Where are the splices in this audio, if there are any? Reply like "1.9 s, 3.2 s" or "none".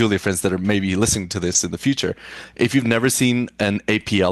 2.5 s